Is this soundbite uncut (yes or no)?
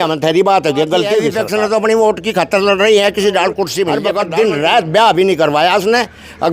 no